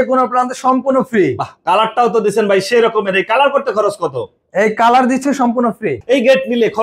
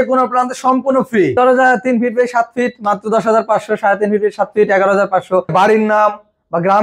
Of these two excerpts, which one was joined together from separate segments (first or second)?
second